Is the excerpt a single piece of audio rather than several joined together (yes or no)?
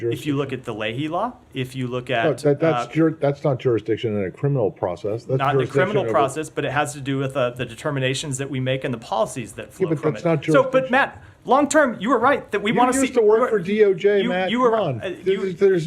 yes